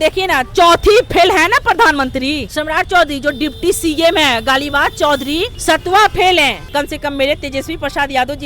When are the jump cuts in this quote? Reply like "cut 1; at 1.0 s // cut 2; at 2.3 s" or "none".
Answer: cut 1; at 2.5 s // cut 2; at 5.5 s // cut 3; at 6.6 s